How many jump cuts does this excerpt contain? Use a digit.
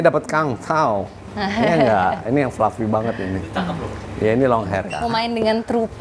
1